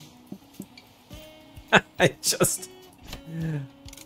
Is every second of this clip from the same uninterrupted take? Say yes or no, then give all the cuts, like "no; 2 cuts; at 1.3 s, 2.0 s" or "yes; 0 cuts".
yes; 0 cuts